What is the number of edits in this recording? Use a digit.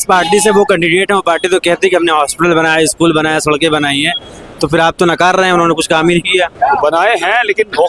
0